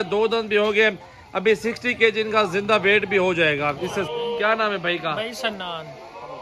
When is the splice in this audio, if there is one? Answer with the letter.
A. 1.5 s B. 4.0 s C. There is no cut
B